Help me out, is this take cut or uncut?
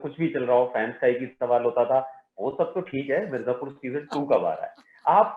uncut